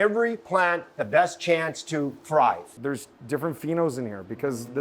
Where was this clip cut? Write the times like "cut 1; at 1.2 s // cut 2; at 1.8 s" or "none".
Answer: cut 1; at 2.7 s